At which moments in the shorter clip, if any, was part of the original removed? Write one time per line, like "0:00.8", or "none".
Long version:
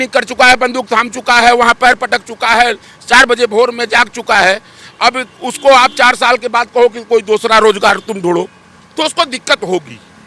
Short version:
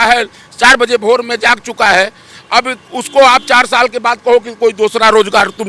none